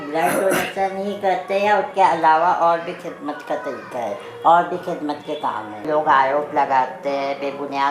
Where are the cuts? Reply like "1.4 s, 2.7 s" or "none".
5.8 s